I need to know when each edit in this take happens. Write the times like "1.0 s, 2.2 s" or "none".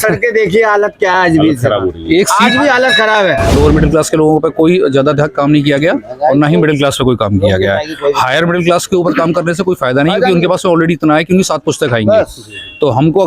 3.5 s